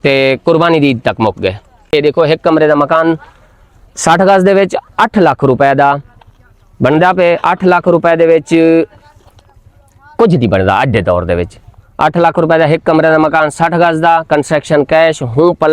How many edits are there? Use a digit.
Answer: 1